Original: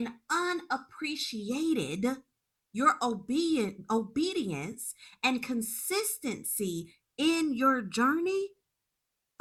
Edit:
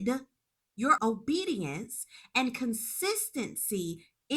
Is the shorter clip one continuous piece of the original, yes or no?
no